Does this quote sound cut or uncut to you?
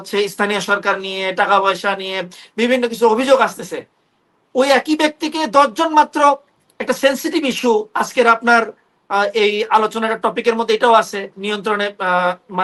uncut